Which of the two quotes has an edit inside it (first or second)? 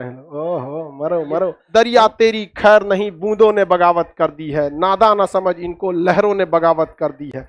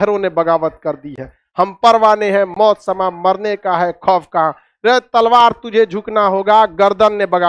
first